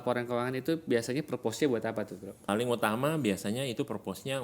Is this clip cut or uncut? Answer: cut